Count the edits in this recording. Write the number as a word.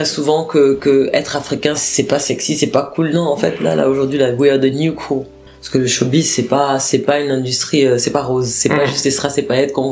two